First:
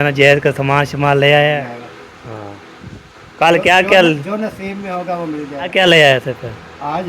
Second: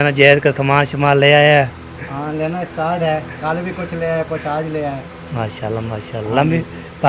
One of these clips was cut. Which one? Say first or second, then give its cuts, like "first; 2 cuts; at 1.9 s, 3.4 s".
first; 2 cuts; at 1.6 s, 5.7 s